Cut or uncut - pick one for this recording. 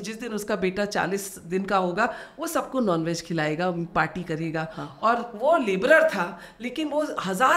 uncut